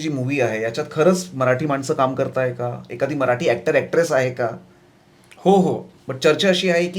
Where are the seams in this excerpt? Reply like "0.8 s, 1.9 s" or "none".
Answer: 5.9 s

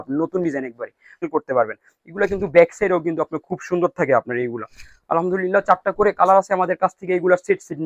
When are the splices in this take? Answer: 1.3 s

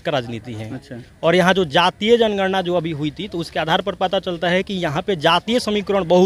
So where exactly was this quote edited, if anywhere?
none

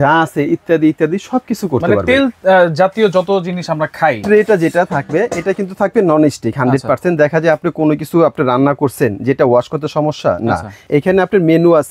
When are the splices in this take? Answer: 4.2 s, 10.8 s

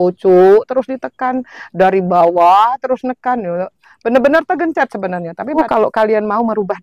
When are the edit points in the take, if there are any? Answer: 5.5 s

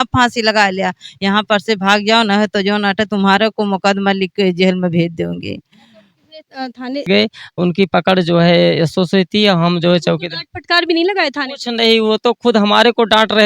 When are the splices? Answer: 7.0 s

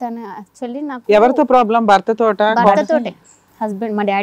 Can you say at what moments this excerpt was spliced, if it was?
2.9 s

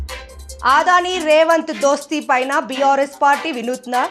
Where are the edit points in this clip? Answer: none

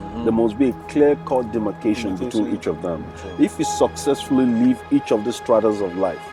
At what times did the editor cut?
none

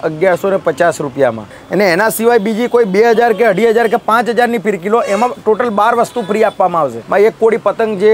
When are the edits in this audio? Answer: 1.5 s, 7.0 s

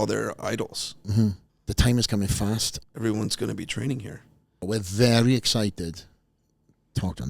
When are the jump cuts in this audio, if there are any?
1.5 s, 2.8 s, 4.6 s

